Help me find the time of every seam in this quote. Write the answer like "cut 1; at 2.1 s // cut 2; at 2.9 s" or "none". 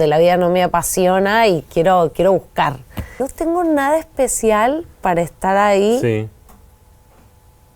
cut 1; at 3.3 s